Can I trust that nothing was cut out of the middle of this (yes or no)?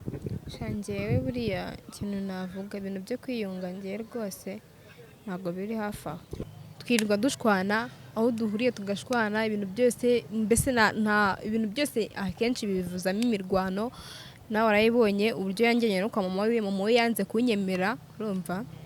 no